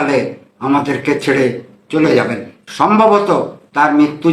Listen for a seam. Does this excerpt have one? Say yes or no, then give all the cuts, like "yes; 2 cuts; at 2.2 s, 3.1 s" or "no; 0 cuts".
yes; 1 cut; at 2.6 s